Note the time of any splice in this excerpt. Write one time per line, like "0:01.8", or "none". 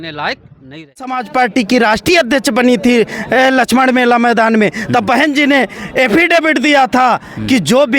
0:01.2